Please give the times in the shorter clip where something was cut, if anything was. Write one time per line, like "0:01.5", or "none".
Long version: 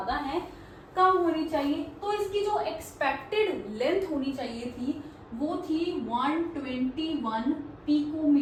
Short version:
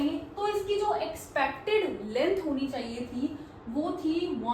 none